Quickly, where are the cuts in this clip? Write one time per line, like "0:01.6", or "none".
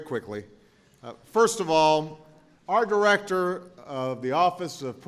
0:03.2